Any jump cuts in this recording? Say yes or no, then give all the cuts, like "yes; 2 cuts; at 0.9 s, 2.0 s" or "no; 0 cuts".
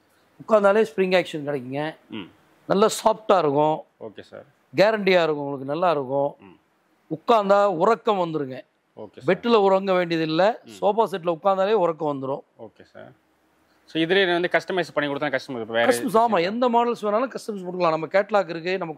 no; 0 cuts